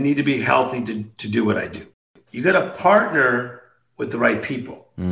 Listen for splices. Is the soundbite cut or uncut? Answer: cut